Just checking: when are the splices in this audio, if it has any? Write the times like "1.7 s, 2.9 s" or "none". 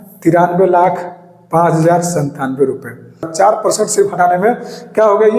3.3 s

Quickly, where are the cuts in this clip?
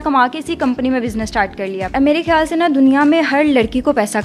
1.9 s

